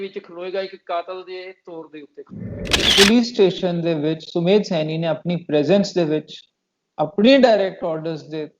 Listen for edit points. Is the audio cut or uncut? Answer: cut